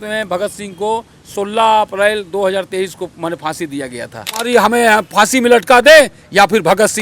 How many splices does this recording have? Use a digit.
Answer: 1